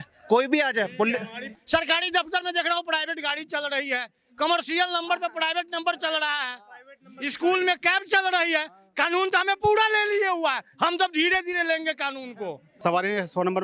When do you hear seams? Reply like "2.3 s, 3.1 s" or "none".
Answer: 1.5 s, 12.8 s